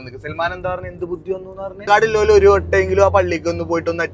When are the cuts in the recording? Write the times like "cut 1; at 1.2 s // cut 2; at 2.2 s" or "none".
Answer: cut 1; at 1.8 s